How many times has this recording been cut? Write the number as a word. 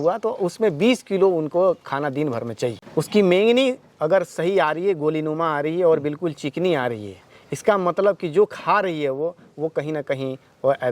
one